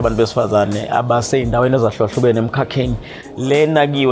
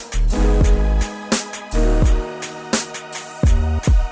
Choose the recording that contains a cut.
second; 1 cut; at 2.8 s

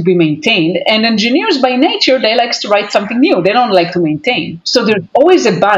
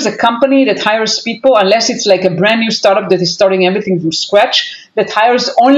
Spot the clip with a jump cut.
first; 1 cut; at 4.5 s

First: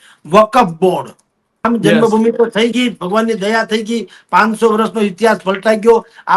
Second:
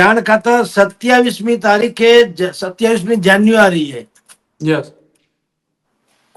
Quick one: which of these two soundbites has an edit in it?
first; 1 cut; at 1.6 s

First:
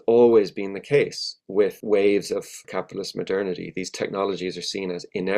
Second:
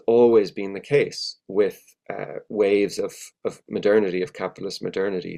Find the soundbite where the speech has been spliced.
first; 2 cuts; at 1.8 s, 2.7 s

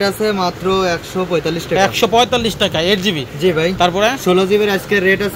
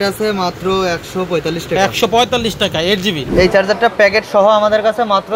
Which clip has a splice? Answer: second; 1 cut; at 3.2 s

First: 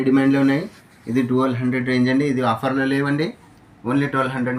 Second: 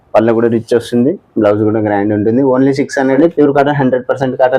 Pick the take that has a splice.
second; 1 cut; at 3.1 s

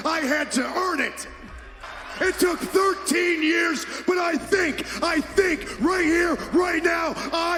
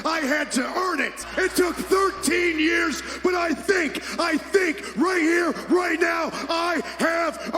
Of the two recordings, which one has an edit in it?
second; 1 cut; at 1.2 s

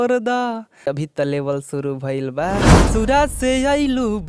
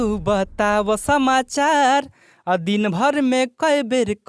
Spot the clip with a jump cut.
first; 2 cuts; at 0.9 s, 2.9 s

